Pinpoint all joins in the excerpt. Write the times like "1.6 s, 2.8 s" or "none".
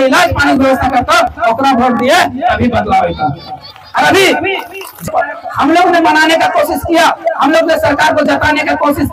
5.1 s